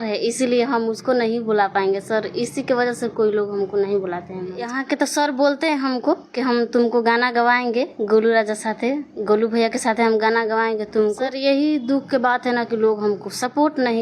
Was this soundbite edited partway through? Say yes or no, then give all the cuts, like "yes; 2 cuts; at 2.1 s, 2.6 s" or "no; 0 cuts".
yes; 2 cuts; at 4.7 s, 11.3 s